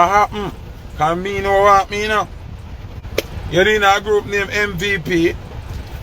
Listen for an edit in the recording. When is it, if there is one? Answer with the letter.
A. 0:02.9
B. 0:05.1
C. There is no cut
A